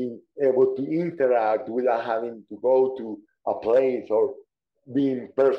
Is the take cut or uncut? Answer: uncut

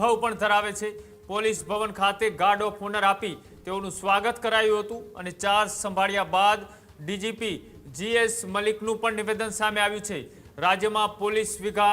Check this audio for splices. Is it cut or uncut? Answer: uncut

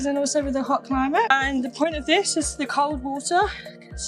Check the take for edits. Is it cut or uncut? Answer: uncut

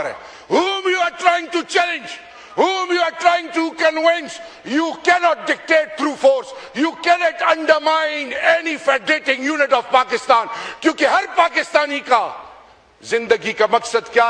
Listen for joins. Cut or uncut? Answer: uncut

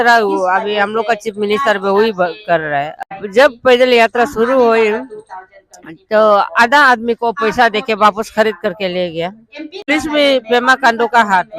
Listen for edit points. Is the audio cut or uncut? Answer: cut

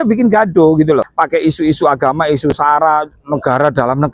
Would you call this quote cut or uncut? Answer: cut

